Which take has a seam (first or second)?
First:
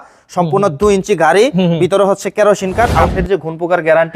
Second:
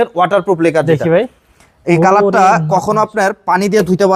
first